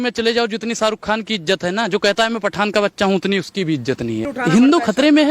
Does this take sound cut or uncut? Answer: cut